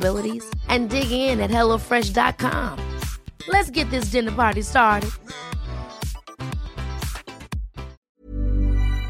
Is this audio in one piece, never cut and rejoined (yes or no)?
no